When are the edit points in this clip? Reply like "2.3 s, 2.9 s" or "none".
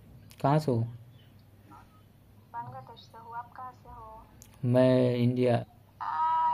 5.6 s